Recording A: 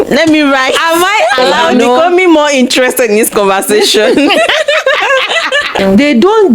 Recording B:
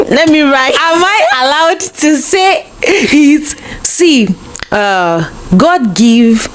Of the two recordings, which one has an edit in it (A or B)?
A